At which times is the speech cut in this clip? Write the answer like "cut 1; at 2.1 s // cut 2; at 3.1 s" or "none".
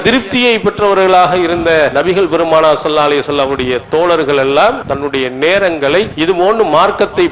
cut 1; at 1.9 s // cut 2; at 4.9 s // cut 3; at 6.1 s